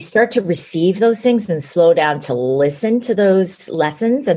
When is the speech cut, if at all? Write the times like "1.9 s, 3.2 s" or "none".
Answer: none